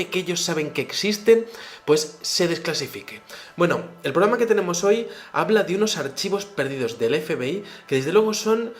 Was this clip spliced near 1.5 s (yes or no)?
no